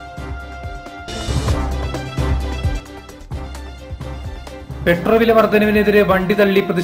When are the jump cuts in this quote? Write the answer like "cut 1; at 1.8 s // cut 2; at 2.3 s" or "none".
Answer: none